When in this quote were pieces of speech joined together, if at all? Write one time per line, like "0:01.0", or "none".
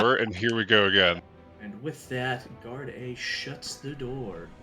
0:01.2

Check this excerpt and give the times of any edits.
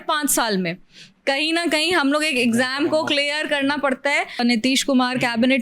0:04.4

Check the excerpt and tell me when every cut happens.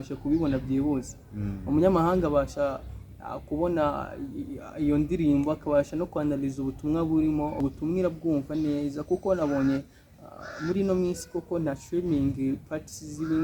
0:07.6

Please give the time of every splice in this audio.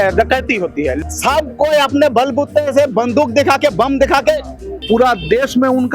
0:00.9
0:04.7

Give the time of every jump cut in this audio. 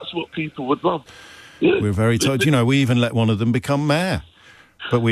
0:01.0

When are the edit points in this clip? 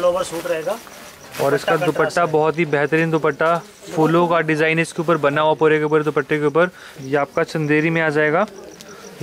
0:06.9

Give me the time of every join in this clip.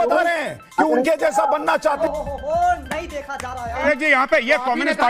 0:02.0
0:03.8

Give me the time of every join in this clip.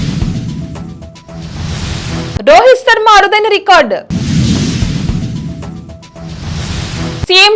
none

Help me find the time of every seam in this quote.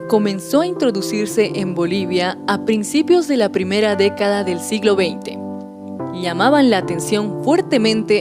none

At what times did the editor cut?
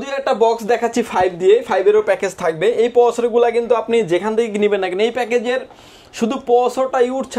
none

